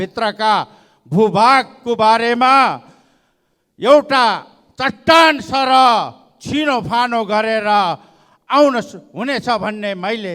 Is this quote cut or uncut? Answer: uncut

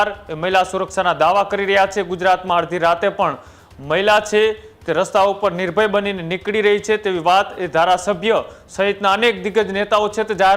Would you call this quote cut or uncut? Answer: uncut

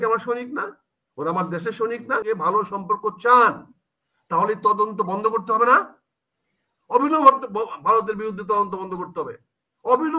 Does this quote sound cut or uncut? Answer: cut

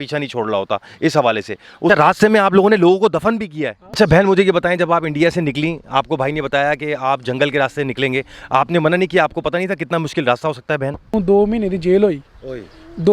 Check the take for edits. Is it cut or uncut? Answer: cut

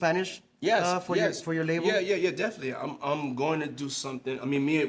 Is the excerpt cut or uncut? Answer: uncut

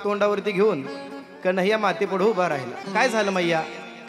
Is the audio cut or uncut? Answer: cut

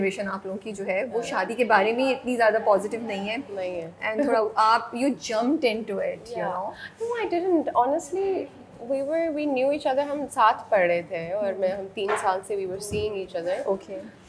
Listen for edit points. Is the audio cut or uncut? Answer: uncut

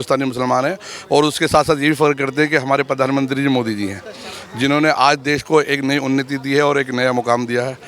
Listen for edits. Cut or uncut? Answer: uncut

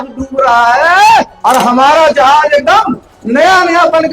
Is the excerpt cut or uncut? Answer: cut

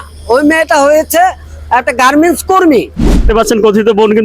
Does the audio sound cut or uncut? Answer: cut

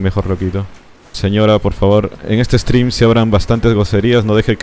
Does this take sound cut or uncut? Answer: uncut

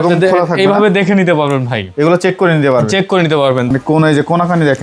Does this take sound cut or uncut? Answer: cut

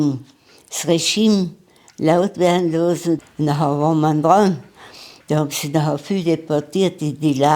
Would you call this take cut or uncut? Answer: cut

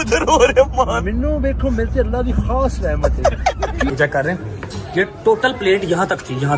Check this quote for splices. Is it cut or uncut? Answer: cut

